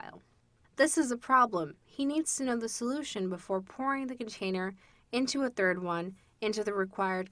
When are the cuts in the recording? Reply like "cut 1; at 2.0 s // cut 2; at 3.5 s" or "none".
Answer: cut 1; at 6.0 s